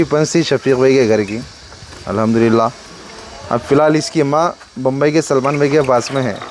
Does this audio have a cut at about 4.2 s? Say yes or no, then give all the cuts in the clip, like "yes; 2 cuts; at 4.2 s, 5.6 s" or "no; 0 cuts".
no; 0 cuts